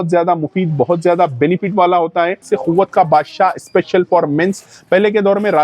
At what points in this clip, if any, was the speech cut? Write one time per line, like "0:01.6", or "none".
0:02.4